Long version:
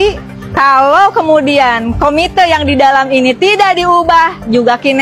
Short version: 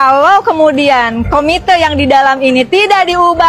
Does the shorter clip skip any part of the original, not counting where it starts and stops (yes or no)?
no